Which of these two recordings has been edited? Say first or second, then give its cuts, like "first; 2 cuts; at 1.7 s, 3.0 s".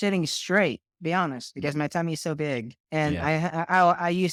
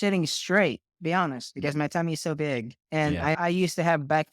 second; 1 cut; at 3.4 s